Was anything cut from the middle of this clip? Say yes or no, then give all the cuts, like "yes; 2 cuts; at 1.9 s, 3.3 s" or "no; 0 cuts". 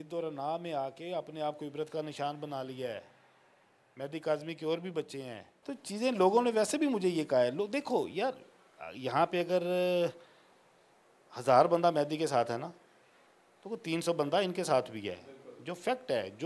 yes; 1 cut; at 5.3 s